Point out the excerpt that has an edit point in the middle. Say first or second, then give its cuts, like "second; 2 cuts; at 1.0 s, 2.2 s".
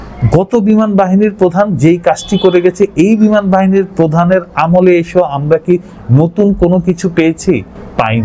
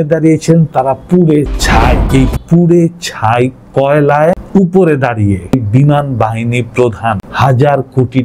second; 4 cuts; at 2.0 s, 4.4 s, 5.5 s, 7.3 s